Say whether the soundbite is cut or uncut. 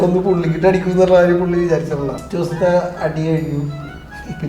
cut